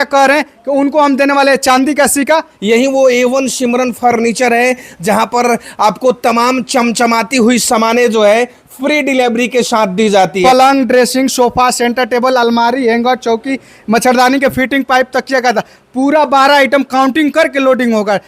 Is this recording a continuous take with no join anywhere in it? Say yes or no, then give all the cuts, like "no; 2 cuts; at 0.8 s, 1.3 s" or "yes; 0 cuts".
no; 2 cuts; at 2.5 s, 10.4 s